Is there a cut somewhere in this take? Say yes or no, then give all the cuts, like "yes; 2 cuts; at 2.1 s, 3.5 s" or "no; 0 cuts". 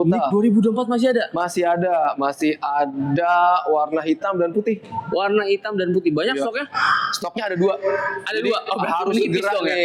no; 0 cuts